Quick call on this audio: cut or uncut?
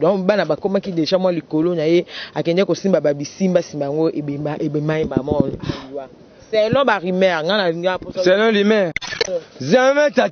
cut